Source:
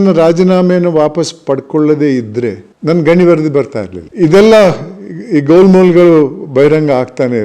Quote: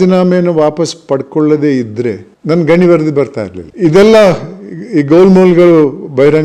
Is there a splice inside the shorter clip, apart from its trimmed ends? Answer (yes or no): no